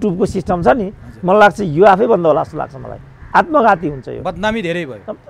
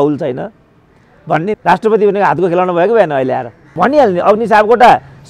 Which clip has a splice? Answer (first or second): second